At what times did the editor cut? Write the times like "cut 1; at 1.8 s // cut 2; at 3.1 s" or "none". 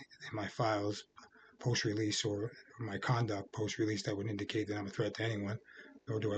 none